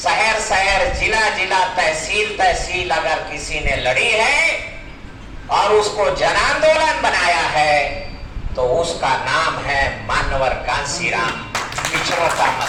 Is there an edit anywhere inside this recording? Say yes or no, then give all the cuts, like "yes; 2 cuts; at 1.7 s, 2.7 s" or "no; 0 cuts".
no; 0 cuts